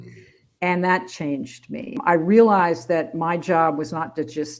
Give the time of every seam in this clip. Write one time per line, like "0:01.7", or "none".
0:02.0

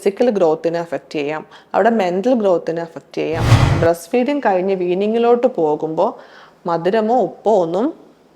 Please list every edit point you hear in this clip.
0:03.6

